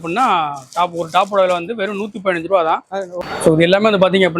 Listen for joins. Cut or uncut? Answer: cut